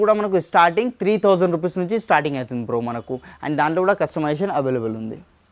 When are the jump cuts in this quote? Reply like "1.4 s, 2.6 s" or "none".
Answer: none